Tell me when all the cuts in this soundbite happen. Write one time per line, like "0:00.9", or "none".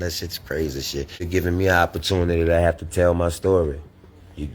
0:01.3